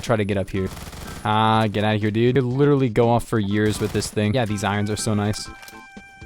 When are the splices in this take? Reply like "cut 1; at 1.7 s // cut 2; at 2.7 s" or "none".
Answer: cut 1; at 2.3 s